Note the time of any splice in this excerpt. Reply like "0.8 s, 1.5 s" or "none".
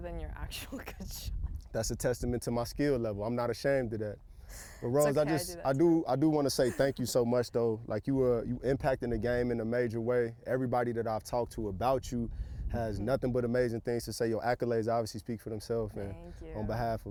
none